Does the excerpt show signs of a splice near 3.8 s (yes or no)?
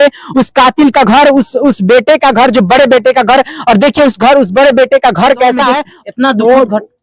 no